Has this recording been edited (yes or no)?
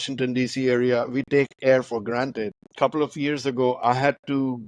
yes